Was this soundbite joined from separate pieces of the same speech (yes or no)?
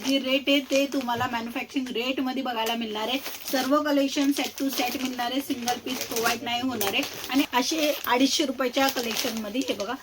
yes